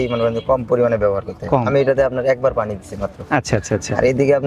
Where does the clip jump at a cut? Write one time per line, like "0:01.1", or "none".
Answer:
none